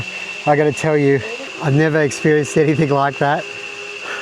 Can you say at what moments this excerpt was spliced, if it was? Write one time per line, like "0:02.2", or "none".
0:01.4